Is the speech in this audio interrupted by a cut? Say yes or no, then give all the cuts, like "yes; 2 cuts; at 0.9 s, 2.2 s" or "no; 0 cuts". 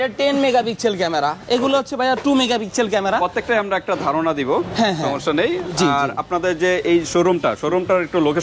no; 0 cuts